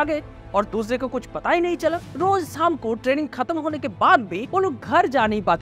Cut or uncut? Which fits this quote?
cut